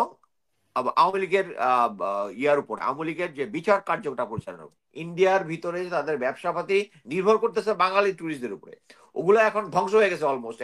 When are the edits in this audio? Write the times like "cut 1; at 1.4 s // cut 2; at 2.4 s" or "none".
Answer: cut 1; at 4.8 s